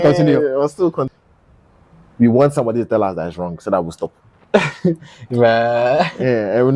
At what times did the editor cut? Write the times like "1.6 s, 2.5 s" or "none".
1.1 s